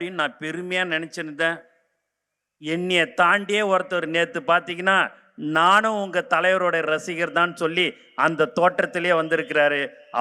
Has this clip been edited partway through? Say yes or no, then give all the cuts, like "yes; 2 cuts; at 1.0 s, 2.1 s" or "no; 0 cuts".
no; 0 cuts